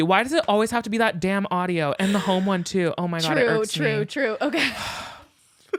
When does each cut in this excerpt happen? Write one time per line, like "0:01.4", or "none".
none

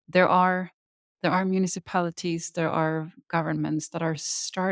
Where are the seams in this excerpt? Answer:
0:01.0

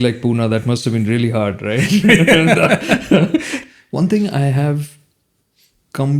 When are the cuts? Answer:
0:03.5

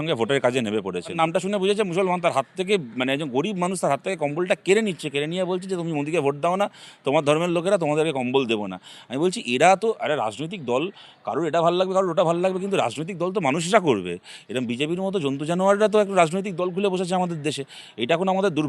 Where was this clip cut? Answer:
0:01.2

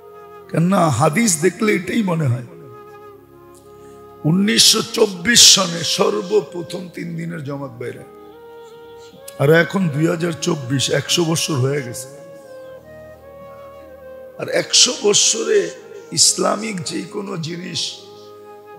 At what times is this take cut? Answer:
0:02.4
0:04.2
0:08.0
0:09.4
0:12.2
0:14.2

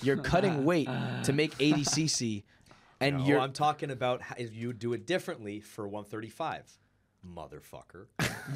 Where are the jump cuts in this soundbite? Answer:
none

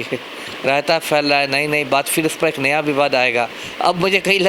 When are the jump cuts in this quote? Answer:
none

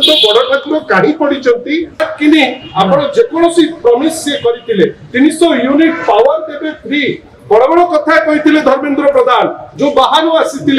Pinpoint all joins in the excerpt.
0:02.0

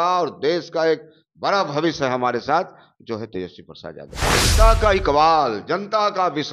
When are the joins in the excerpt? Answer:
0:04.4

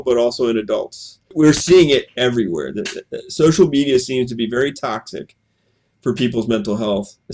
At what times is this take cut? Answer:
0:01.3

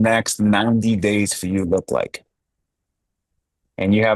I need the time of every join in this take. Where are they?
none

